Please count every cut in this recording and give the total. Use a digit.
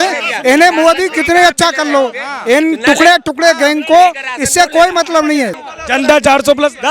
1